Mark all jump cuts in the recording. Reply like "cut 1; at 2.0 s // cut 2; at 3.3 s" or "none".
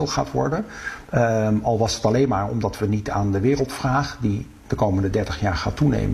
none